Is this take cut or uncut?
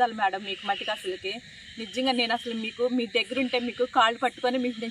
uncut